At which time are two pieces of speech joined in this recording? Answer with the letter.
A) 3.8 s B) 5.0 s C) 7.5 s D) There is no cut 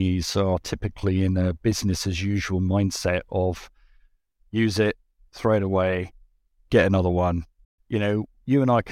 C